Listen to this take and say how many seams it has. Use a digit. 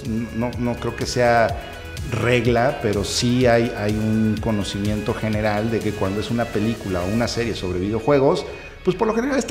0